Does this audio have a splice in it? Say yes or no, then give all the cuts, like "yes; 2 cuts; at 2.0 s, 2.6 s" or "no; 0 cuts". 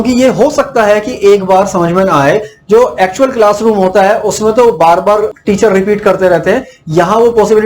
yes; 1 cut; at 5.4 s